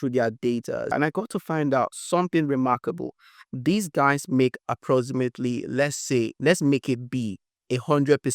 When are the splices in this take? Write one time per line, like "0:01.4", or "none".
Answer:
0:00.9